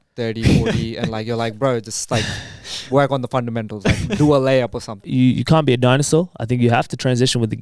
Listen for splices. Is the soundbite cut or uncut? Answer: cut